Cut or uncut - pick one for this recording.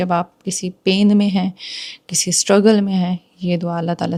uncut